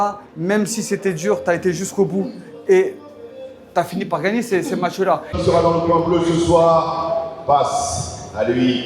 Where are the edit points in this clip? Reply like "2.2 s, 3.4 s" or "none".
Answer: 5.3 s